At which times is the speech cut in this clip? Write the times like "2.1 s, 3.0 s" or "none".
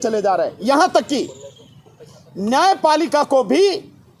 none